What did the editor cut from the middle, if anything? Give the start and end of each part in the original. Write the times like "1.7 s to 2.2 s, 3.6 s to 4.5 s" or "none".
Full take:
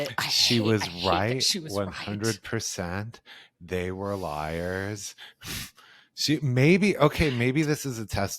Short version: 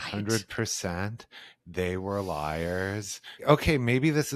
5.4 s to 7.0 s